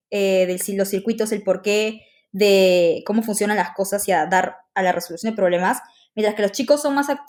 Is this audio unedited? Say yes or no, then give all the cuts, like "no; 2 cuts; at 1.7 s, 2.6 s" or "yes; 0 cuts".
yes; 0 cuts